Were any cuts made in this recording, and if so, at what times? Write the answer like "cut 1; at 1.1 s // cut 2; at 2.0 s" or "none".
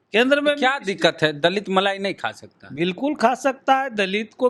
none